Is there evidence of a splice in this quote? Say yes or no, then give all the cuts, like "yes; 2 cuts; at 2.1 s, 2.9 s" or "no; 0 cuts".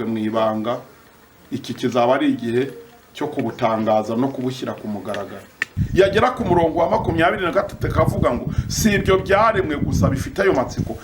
yes; 1 cut; at 5.6 s